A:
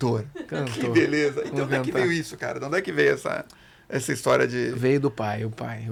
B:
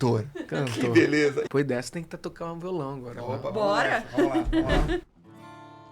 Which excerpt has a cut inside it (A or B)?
B